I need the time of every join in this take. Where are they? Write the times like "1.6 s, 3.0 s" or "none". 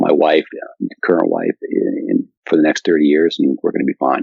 2.3 s